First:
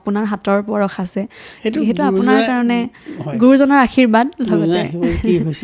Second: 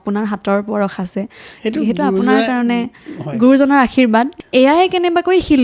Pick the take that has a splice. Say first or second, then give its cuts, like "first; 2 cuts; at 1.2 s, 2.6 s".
second; 1 cut; at 4.4 s